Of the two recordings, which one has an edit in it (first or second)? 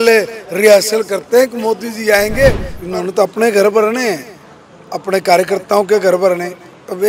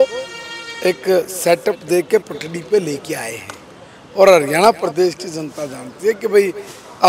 first